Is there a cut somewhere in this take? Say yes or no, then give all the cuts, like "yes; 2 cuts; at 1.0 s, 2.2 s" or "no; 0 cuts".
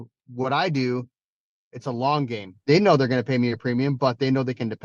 yes; 1 cut; at 2.6 s